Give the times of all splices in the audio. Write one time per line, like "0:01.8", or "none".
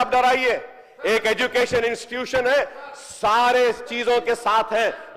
none